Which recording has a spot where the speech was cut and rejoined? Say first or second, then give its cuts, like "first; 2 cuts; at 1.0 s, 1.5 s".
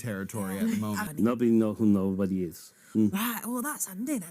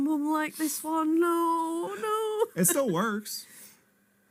first; 1 cut; at 1.1 s